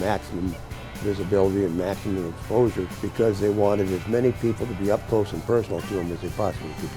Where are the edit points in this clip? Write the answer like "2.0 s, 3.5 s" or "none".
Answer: 3.0 s